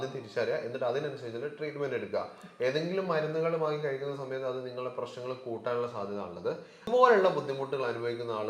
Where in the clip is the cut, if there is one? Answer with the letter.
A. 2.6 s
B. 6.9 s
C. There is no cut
B